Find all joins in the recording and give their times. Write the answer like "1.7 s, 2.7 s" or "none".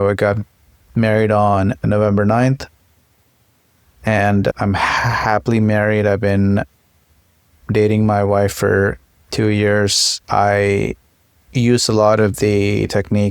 1.8 s, 4.5 s, 10.1 s